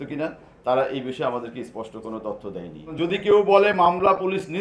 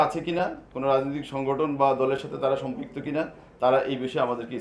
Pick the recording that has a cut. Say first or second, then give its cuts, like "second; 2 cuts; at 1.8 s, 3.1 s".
first; 1 cut; at 2.9 s